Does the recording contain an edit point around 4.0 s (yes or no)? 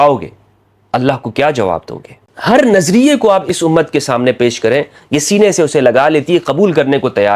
no